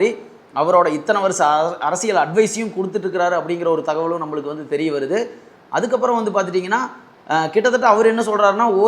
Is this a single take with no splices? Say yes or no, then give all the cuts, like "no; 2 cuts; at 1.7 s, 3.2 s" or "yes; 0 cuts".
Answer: yes; 0 cuts